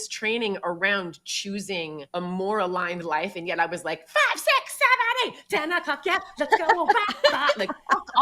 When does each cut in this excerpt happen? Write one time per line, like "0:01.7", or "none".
0:02.0